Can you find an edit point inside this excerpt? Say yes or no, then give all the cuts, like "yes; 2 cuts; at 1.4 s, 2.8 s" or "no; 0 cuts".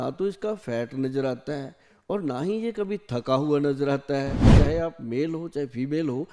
yes; 1 cut; at 4.5 s